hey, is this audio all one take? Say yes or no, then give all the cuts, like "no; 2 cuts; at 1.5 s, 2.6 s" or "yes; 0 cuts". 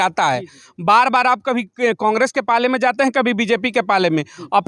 yes; 0 cuts